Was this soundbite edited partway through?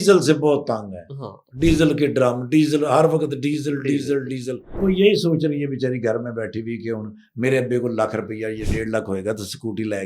yes; 1 cut; at 4.6 s

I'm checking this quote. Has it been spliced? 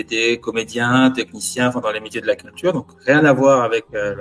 no; 0 cuts

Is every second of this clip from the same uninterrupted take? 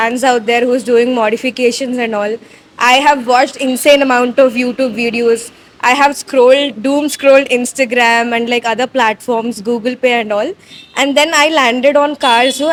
yes; 0 cuts

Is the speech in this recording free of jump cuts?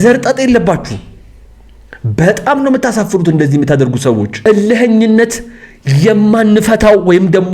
no; 1 cut; at 4.3 s

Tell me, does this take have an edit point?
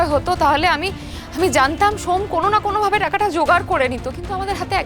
no; 0 cuts

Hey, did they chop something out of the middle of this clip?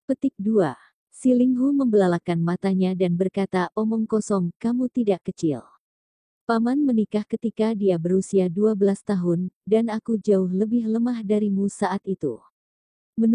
yes; 1 cut; at 0.9 s

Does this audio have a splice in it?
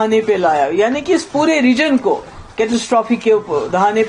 no; 0 cuts

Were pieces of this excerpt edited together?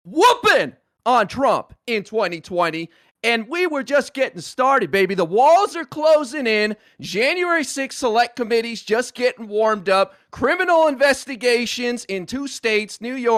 no; 0 cuts

